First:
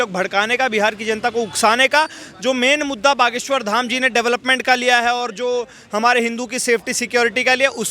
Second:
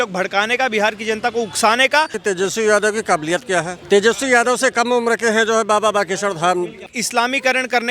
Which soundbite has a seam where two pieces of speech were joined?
second; 2 cuts; at 2.2 s, 6.9 s

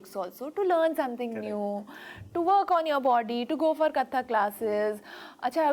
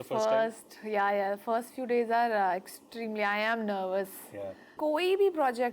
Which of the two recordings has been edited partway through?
second; 1 cut; at 4.7 s

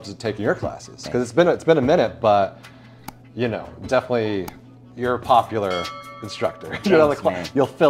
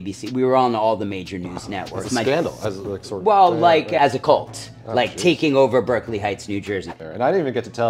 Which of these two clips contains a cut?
second; 2 cuts; at 4.0 s, 7.0 s

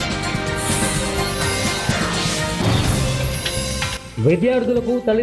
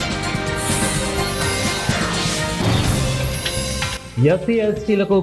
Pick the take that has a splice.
first; 1 cut; at 4.0 s

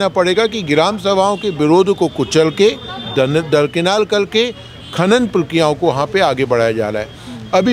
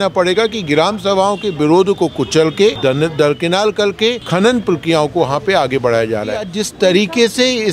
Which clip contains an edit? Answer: second; 3 cuts; at 2.8 s, 4.2 s, 6.6 s

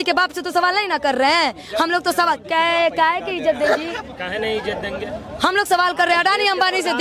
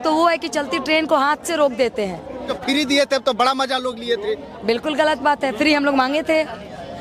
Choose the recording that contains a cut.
second; 1 cut; at 2.5 s

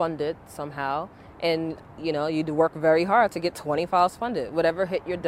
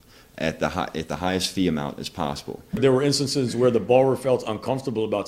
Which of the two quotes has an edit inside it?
second; 1 cut; at 2.8 s

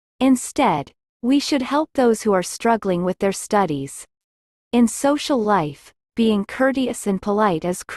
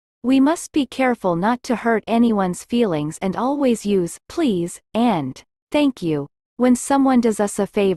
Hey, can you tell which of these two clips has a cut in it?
first; 1 cut; at 4.8 s

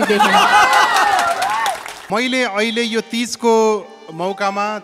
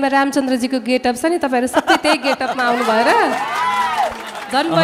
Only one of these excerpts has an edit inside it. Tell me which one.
first; 1 cut; at 1.9 s

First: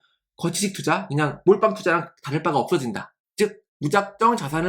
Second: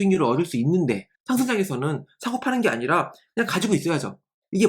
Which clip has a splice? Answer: second; 1 cut; at 1.1 s

